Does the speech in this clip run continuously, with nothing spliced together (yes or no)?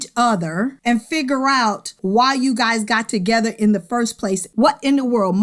no